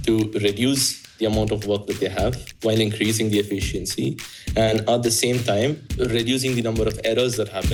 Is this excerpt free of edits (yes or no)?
yes